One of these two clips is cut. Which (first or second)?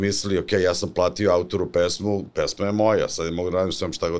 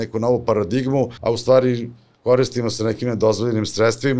second